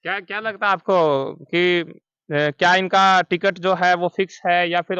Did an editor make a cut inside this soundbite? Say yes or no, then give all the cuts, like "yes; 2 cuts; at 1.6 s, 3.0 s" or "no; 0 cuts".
no; 0 cuts